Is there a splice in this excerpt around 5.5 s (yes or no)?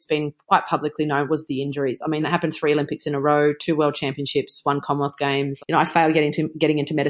yes